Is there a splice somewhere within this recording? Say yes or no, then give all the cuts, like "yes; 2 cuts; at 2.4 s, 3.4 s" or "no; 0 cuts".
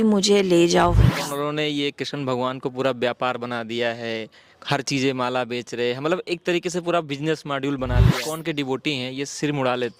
yes; 2 cuts; at 1.1 s, 8.2 s